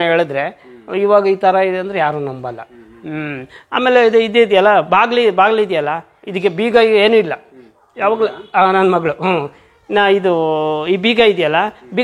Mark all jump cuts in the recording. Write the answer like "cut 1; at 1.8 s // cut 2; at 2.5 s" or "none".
none